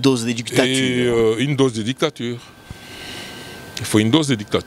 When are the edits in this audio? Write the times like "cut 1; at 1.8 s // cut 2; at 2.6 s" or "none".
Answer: none